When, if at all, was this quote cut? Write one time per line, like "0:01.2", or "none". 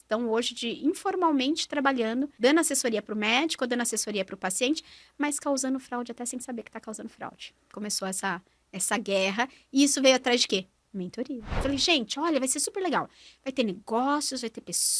0:02.3
0:07.7
0:11.6